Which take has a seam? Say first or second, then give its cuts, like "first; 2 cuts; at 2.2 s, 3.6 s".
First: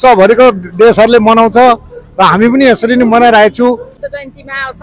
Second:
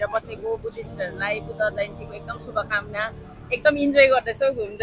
first; 1 cut; at 3.9 s